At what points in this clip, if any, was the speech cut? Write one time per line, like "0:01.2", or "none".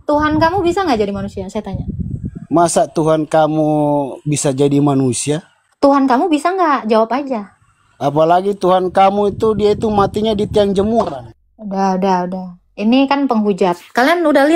none

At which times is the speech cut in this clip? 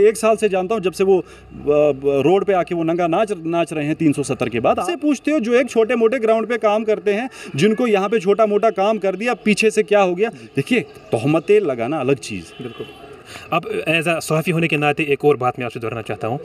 0:04.8
0:13.3

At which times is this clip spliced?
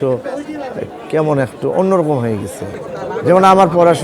0:02.8

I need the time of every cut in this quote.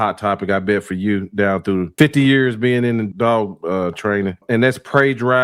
0:01.9
0:03.1
0:04.4

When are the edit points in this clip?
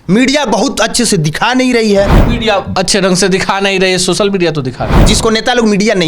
0:02.2
0:05.0

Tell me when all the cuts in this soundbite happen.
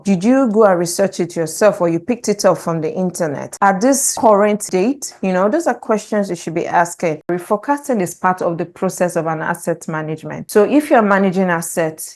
0:07.3

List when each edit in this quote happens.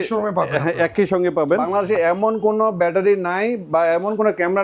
0:01.7

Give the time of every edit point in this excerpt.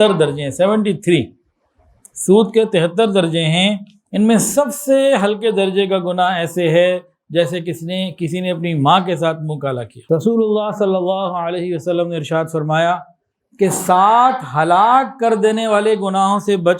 0:09.9

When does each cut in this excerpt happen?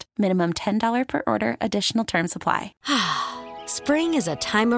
0:02.7

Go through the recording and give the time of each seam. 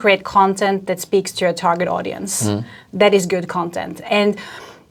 none

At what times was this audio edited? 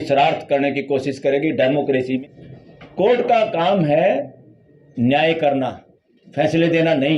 0:02.2

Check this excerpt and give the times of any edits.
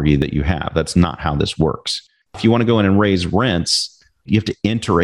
0:02.4
0:04.3

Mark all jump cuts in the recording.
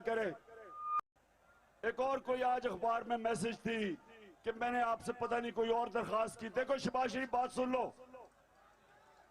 0:01.0

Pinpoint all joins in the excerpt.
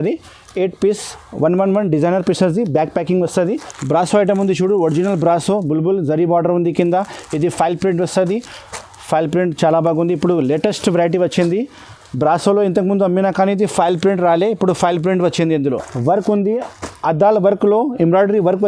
0:03.7
0:15.9

